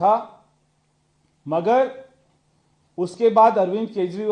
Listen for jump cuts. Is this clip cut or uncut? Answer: uncut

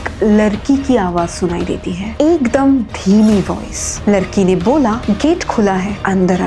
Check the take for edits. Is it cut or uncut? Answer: uncut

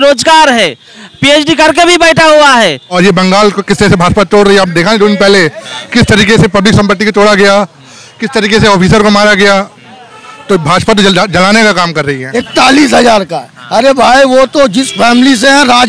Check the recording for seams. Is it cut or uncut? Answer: cut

